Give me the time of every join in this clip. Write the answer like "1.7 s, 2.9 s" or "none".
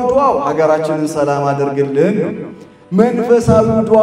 none